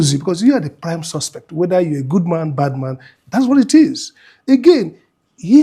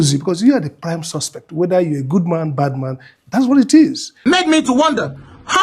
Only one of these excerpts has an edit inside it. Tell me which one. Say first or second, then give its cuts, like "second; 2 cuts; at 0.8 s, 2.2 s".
second; 1 cut; at 4.1 s